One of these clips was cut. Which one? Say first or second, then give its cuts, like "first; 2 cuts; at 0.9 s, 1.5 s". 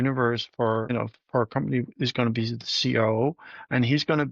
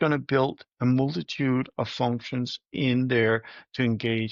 first; 1 cut; at 0.9 s